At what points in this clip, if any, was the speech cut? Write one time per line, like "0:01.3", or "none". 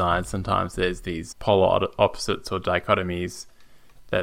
0:01.2